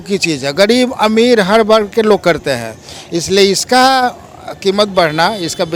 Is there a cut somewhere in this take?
no; 0 cuts

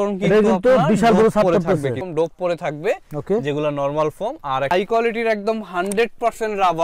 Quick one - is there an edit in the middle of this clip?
yes; 2 cuts; at 2.0 s, 4.7 s

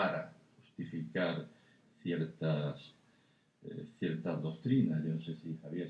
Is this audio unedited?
yes; 0 cuts

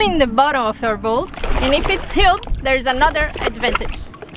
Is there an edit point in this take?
yes; 1 cut; at 1.4 s

